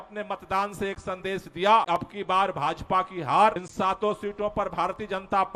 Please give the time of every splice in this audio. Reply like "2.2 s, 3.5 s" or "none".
1.9 s, 3.6 s